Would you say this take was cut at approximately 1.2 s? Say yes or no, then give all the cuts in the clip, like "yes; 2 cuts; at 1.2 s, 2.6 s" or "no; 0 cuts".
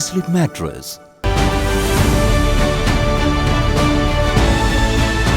yes; 1 cut; at 1.2 s